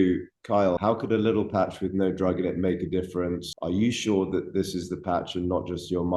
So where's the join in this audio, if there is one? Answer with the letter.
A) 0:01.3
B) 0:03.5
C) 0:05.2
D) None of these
B